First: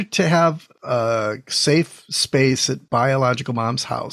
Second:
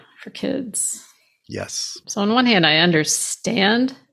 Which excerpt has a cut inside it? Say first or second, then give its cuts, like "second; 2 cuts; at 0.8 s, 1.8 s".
second; 1 cut; at 2.1 s